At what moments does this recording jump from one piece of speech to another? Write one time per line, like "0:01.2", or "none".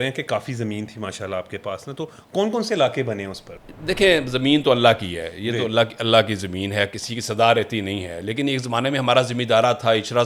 none